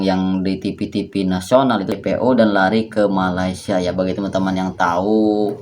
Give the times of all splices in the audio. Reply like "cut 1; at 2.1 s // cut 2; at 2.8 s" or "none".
cut 1; at 2.0 s